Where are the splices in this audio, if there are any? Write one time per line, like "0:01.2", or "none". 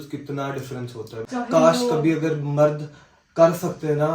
0:01.2